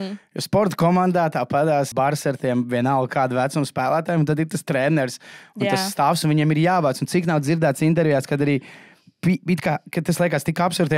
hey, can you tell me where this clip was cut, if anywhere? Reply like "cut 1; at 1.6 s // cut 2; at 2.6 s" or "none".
cut 1; at 1.9 s

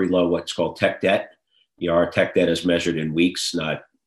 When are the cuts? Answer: none

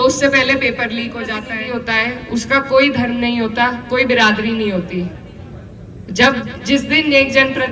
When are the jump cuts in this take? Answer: cut 1; at 1.5 s

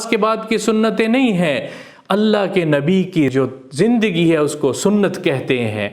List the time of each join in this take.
cut 1; at 3.3 s

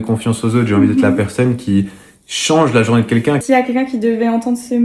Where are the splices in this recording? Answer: cut 1; at 3.4 s

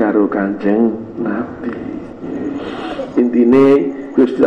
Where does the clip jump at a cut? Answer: cut 1; at 2.3 s

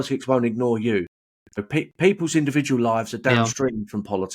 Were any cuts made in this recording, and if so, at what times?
cut 1; at 1.7 s

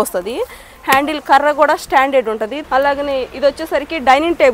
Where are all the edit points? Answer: cut 1; at 2.6 s

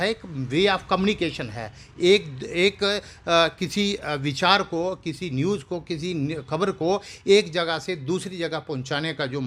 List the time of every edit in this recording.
none

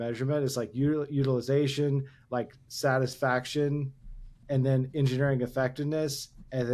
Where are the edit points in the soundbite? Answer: cut 1; at 4.4 s

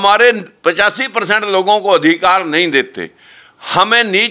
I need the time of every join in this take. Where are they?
none

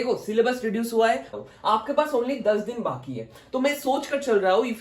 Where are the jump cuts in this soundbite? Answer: cut 1; at 1.3 s

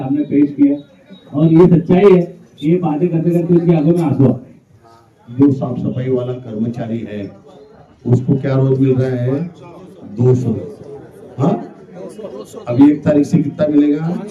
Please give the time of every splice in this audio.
cut 1; at 5.2 s

